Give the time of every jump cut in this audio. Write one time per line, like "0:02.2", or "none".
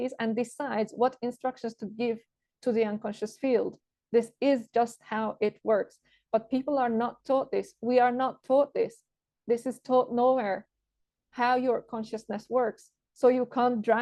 none